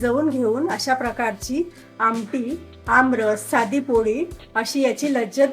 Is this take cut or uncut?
cut